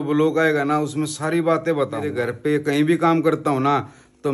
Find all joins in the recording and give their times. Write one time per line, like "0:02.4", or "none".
0:02.1

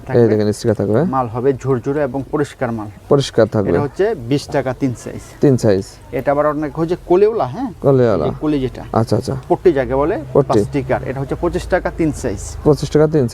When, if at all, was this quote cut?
none

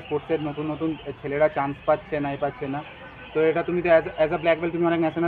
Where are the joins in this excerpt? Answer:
none

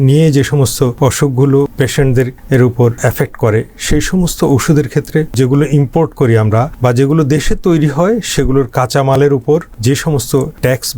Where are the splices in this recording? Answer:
0:00.9
0:02.0
0:03.0
0:05.3
0:06.7
0:10.2

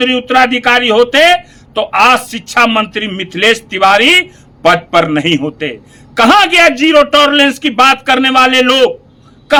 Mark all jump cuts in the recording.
none

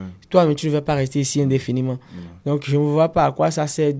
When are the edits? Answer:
none

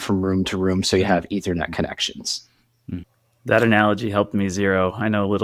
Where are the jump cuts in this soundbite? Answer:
0:03.0

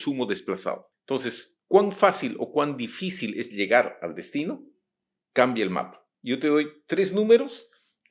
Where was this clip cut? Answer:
0:00.9

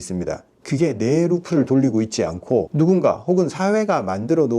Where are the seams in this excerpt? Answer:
0:02.7

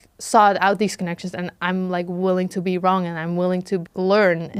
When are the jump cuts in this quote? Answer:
none

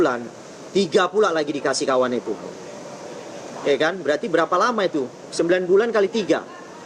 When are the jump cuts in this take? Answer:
none

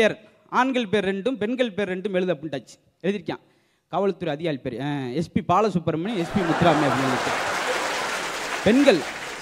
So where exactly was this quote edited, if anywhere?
none

